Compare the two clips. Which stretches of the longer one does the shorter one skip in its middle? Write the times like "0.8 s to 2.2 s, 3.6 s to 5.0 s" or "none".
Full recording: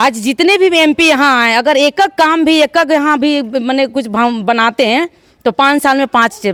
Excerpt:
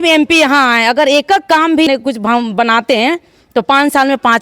2.6 s to 3.8 s

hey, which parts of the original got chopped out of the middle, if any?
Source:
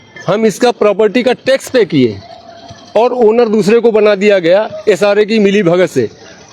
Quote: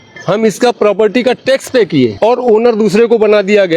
2.1 s to 2.9 s

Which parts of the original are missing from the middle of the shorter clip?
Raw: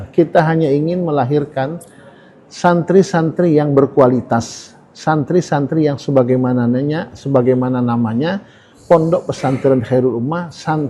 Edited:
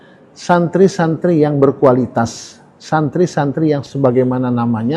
6.0 s to 7.2 s

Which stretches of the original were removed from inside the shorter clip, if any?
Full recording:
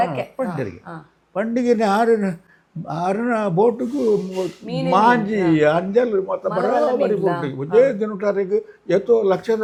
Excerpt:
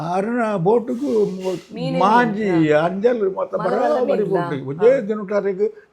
none

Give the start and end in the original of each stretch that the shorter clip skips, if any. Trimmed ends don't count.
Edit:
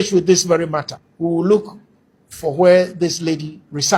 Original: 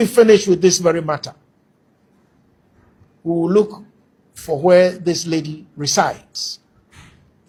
1.4 s to 3.1 s

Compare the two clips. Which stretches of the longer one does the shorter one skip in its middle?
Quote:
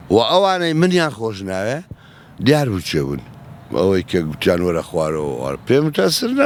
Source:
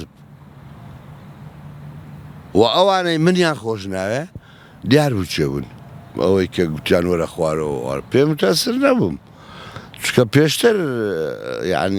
none

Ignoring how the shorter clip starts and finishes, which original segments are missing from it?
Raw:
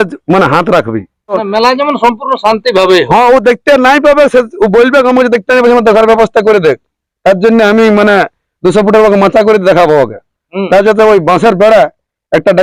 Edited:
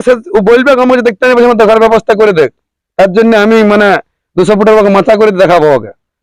none

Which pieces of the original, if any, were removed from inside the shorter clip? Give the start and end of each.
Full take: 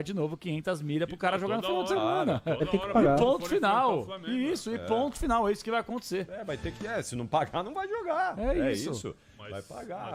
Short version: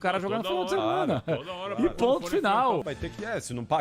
4.0 s to 6.5 s

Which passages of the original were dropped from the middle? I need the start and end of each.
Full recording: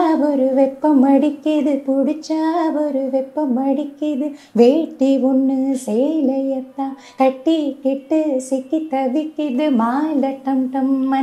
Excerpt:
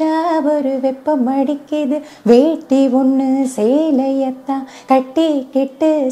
none

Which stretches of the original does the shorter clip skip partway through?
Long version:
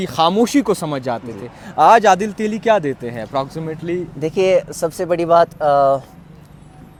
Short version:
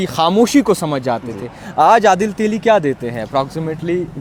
none

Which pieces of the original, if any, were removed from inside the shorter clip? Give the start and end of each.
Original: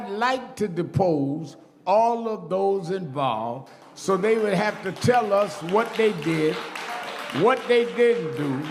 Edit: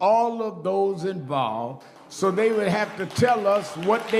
none

